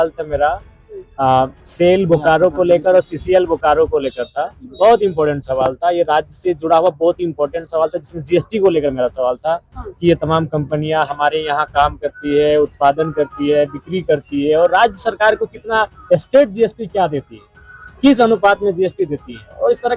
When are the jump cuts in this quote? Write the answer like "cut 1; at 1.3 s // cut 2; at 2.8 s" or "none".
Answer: none